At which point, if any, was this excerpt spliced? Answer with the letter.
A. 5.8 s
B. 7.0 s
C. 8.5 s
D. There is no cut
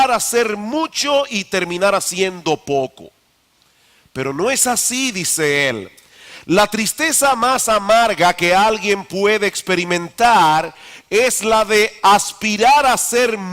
A